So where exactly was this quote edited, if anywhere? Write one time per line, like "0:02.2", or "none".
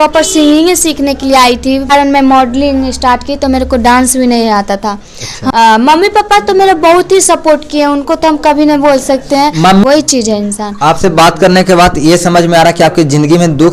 0:01.9
0:05.3
0:09.8